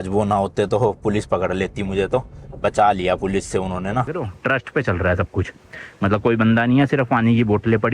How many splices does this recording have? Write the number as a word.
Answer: one